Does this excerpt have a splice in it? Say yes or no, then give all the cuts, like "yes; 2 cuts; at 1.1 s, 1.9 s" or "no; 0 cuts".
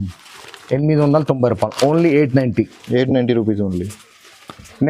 no; 0 cuts